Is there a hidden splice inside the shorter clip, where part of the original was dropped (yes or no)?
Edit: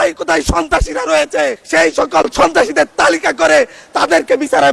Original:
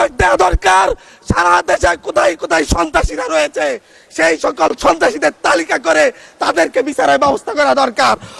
yes